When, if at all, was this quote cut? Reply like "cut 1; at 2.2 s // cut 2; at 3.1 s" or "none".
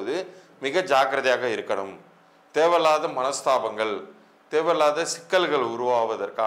none